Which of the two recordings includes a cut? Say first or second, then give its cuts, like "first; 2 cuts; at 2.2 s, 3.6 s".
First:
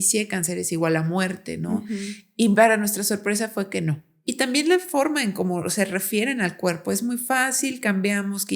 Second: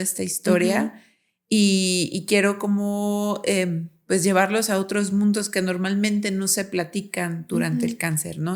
first; 1 cut; at 4.3 s